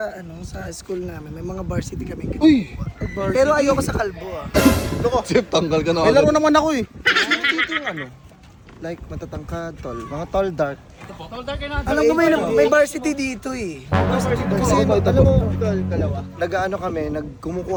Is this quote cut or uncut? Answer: uncut